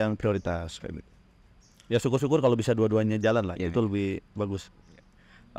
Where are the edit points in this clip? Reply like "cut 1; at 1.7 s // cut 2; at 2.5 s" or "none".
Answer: none